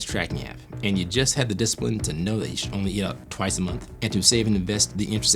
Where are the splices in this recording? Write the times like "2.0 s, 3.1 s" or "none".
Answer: 3.9 s